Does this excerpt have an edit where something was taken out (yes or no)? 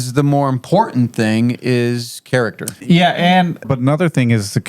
yes